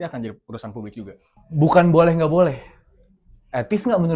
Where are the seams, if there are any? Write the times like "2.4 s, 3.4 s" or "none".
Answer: 1.4 s

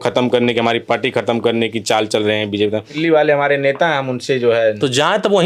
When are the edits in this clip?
2.9 s

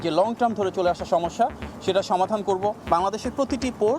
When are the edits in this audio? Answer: 2.8 s

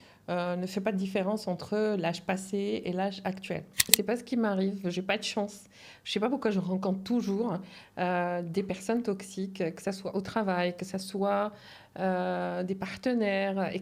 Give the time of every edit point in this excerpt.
3.9 s

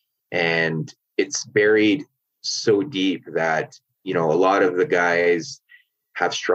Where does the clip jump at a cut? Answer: 1.0 s

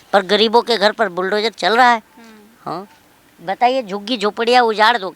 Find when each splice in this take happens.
none

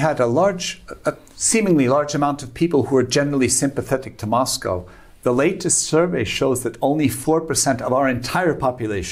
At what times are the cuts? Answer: none

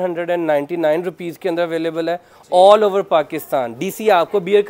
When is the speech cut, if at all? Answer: none

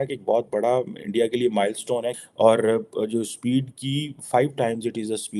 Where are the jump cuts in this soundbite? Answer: 2.1 s

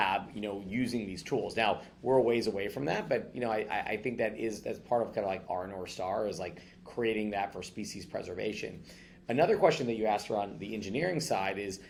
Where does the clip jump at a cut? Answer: none

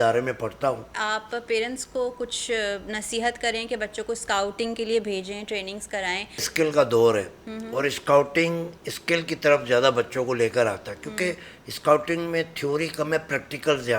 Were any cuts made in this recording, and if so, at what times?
0.9 s, 6.5 s

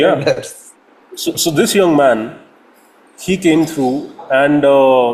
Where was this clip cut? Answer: none

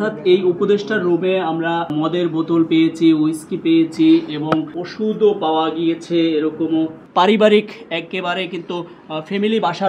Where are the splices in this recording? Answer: 1.9 s, 4.8 s, 7.0 s

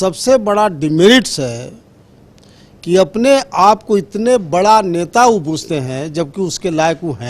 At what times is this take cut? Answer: none

